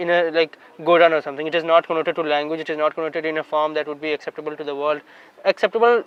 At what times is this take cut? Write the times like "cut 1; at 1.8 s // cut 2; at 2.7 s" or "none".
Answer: none